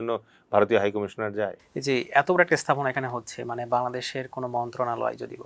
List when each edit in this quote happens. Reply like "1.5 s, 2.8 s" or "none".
1.6 s